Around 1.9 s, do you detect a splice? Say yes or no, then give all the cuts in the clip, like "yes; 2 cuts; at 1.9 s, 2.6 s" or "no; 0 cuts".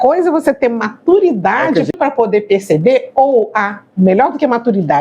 yes; 1 cut; at 1.9 s